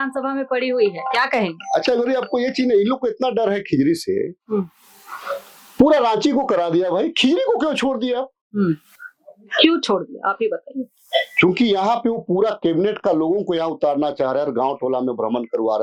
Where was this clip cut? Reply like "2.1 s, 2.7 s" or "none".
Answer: none